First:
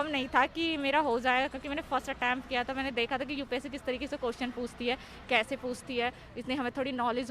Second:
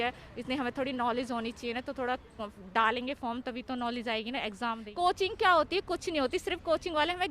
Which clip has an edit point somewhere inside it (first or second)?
second